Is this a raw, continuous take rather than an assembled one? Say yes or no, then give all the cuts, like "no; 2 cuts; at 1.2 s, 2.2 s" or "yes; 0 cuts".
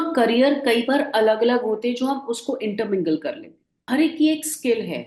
no; 1 cut; at 3.8 s